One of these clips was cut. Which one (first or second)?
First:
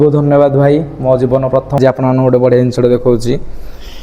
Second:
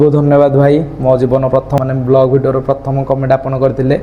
first